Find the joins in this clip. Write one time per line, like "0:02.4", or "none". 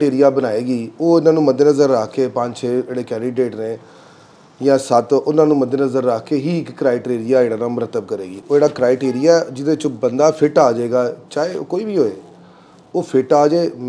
none